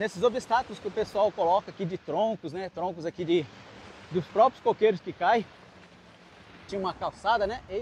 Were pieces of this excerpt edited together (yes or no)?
yes